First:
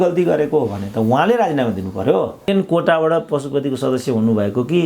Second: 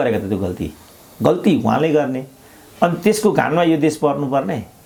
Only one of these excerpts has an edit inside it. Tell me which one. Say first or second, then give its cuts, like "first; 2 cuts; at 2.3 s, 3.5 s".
first; 1 cut; at 2.5 s